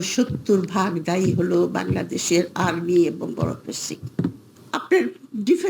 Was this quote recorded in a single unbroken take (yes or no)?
no